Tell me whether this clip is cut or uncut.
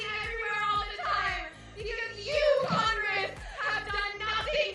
uncut